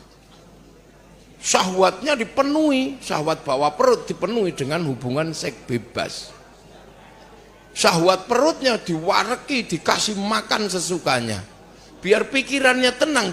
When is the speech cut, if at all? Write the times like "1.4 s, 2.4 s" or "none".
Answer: none

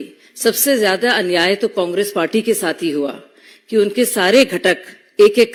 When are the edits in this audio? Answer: none

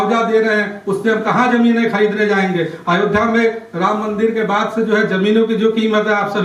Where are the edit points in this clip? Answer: none

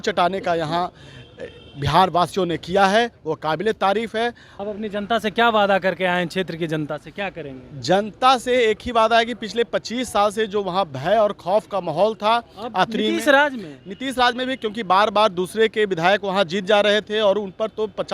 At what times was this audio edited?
4.5 s

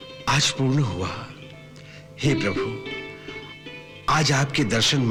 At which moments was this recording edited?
none

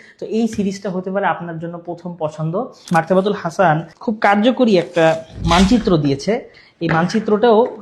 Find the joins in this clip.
2.8 s

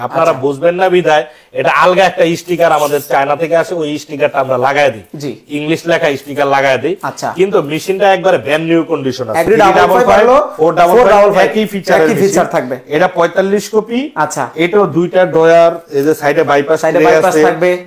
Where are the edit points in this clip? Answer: 9.5 s

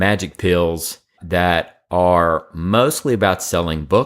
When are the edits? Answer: 1.2 s

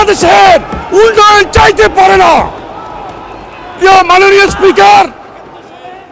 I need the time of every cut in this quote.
none

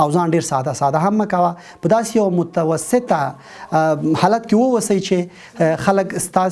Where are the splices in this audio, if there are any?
none

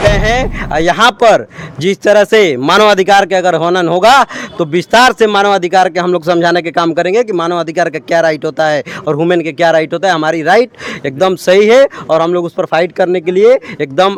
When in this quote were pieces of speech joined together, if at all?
none

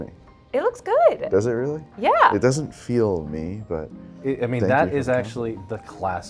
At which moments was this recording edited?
none

